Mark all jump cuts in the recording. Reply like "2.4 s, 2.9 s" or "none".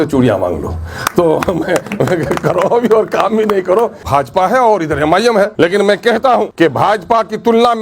4.0 s, 5.5 s, 6.5 s